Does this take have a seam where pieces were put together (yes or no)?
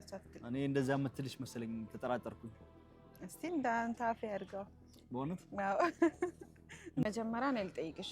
yes